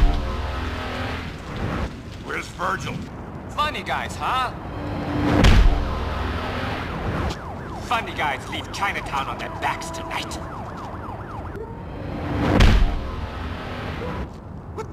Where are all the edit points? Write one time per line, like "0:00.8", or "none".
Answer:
none